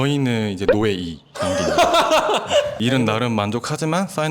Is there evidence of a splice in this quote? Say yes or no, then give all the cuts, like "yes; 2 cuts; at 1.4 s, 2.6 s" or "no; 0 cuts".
no; 0 cuts